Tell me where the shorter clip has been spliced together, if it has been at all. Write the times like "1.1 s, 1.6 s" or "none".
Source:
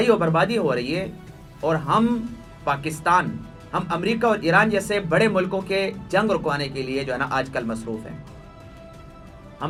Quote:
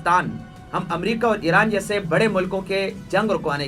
none